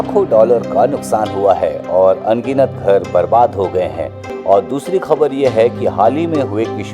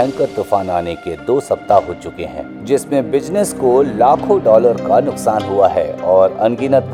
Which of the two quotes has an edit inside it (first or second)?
first